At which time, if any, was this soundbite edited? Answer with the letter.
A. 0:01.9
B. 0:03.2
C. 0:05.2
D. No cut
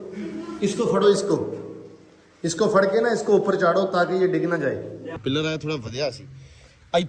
C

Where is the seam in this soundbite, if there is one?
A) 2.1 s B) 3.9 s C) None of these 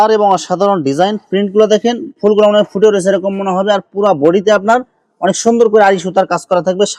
C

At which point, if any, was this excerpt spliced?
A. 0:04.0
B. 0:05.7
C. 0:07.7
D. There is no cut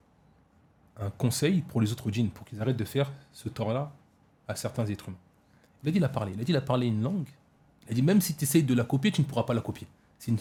D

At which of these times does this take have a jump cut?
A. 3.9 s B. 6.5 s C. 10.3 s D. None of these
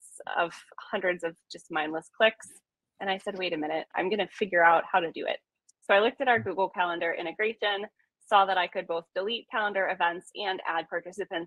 A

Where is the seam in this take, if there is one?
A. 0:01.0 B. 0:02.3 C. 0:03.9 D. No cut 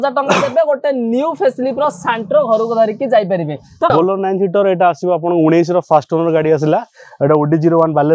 C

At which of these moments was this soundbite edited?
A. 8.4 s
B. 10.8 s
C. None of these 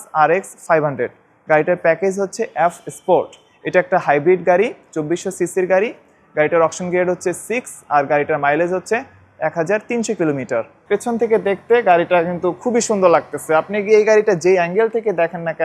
B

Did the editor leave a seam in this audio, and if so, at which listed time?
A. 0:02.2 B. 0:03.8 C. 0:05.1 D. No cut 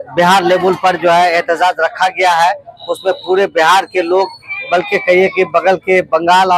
D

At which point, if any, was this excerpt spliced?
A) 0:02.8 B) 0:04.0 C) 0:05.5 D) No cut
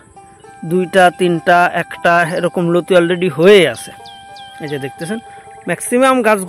D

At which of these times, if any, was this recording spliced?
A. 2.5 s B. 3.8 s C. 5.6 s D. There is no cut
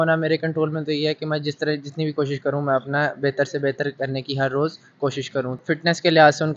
C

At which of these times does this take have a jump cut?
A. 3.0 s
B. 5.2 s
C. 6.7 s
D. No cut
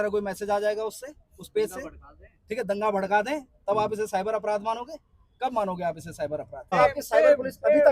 C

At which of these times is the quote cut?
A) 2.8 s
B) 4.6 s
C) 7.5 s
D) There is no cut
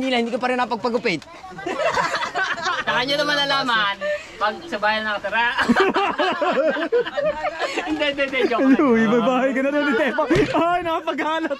A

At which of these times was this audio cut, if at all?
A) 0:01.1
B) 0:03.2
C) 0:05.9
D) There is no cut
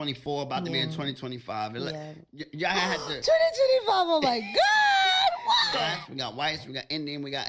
C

